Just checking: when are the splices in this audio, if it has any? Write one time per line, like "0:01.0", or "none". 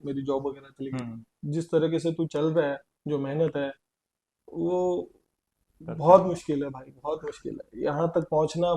0:01.4